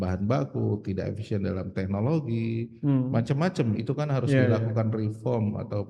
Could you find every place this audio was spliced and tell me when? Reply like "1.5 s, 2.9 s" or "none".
none